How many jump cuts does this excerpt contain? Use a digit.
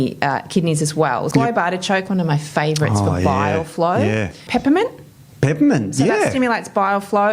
2